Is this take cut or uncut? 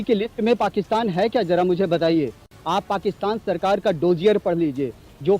cut